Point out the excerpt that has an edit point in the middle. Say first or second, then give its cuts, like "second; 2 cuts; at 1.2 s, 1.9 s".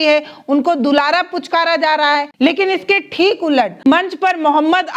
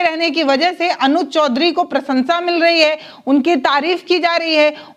first; 1 cut; at 2.3 s